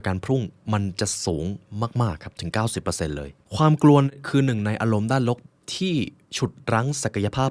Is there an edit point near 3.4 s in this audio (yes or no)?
yes